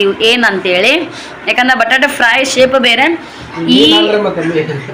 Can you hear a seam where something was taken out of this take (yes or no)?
no